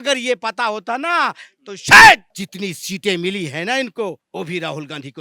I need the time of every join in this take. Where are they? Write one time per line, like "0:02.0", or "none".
0:02.3
0:04.2